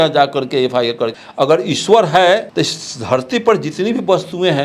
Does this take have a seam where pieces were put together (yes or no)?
yes